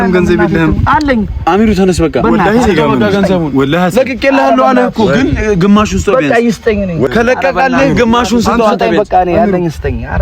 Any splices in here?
yes; 1 cut; at 7.1 s

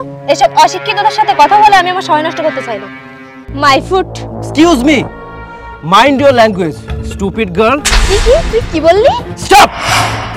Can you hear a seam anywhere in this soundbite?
yes; 1 cut; at 3.5 s

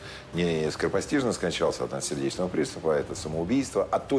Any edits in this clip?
no; 0 cuts

